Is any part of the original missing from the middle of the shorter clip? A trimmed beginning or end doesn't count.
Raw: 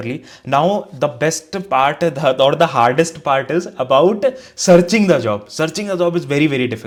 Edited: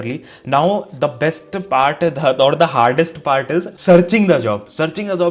yes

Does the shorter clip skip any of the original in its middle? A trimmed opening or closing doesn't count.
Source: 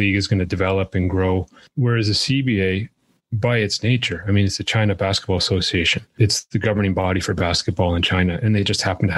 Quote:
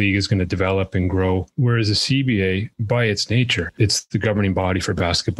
yes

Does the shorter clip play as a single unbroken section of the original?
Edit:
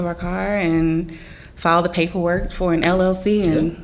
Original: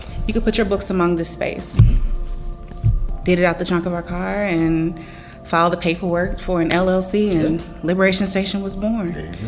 yes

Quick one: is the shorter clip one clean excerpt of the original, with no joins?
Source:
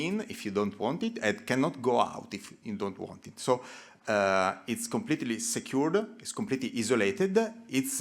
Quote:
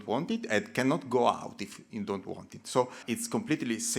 no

